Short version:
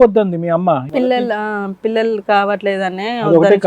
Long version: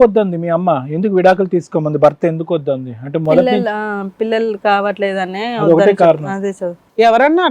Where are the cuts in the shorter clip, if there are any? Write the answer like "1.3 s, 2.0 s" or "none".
1.0 s